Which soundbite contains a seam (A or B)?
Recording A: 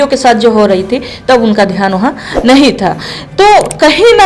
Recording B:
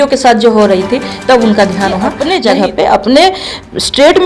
B